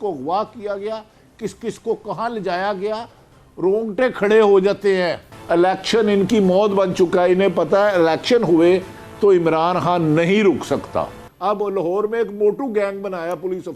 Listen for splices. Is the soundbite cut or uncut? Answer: cut